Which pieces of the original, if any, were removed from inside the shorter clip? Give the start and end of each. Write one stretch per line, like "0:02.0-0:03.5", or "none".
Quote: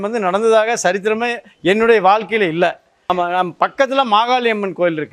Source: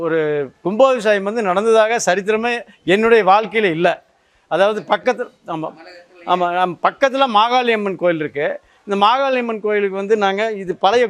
0:04.1-0:06.1

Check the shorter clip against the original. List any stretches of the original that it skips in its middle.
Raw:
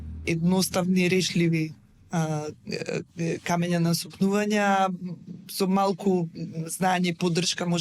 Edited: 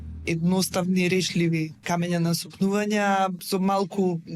0:01.8-0:03.4
0:05.0-0:05.5

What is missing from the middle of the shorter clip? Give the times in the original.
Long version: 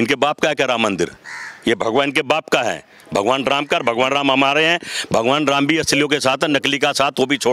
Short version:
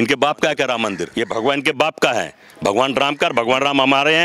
0:01.0-0:01.5

